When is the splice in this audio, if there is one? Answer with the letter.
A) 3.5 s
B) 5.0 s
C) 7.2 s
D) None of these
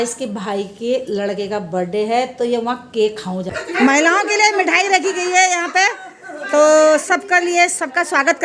A